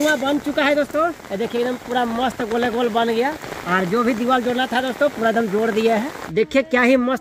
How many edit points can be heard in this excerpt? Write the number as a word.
two